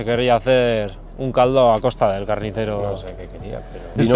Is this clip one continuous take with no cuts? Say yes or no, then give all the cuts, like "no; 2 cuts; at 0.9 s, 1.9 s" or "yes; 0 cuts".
yes; 0 cuts